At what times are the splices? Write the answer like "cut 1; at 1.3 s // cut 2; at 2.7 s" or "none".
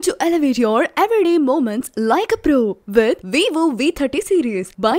none